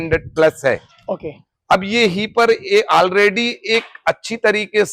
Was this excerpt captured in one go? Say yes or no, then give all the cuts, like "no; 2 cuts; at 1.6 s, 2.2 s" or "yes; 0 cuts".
yes; 0 cuts